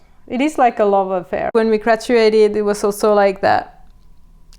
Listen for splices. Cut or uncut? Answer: cut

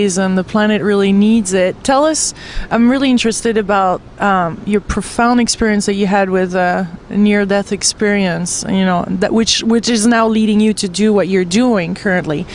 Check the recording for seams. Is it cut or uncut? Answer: uncut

